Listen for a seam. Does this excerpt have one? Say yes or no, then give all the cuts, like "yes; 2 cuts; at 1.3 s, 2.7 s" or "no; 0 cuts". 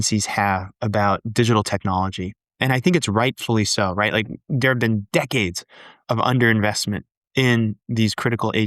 no; 0 cuts